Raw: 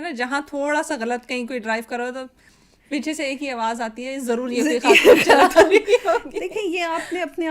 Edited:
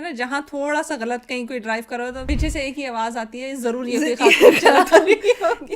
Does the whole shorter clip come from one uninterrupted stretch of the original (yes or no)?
no